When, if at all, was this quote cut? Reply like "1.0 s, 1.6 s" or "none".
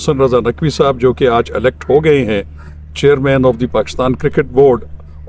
none